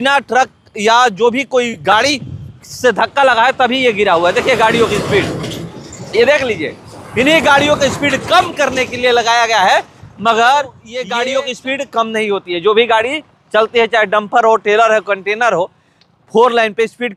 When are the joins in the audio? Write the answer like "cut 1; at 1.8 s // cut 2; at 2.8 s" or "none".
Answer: none